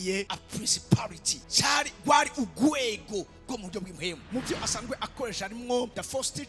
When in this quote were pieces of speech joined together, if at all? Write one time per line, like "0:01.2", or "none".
0:04.3